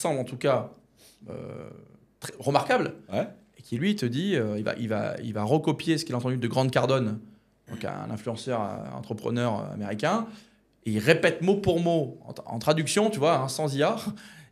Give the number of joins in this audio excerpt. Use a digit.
0